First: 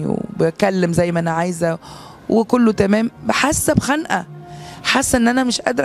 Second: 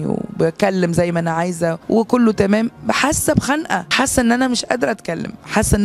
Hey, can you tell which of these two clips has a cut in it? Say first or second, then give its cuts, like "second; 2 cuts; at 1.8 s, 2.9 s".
second; 2 cuts; at 1.8 s, 3.9 s